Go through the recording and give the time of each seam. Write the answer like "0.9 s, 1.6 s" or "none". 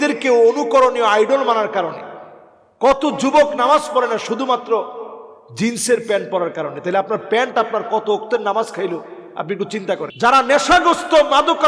10.1 s